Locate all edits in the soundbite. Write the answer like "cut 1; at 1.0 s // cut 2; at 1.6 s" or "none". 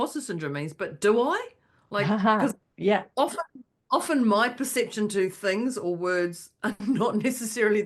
cut 1; at 2.7 s